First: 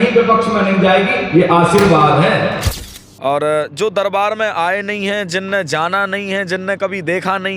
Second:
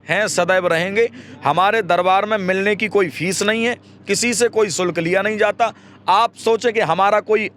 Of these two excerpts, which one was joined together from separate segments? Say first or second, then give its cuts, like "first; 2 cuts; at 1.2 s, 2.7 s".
first; 1 cut; at 2.6 s